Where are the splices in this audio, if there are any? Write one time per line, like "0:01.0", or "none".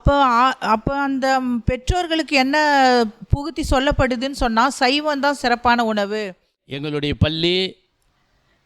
0:06.6